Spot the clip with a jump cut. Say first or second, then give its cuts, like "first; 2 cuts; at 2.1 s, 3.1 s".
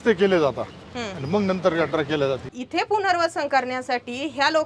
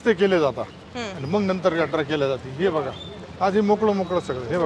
first; 1 cut; at 2.5 s